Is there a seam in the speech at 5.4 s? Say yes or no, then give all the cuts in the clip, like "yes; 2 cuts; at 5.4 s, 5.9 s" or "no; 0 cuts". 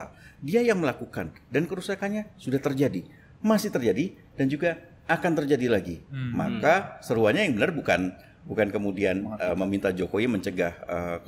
no; 0 cuts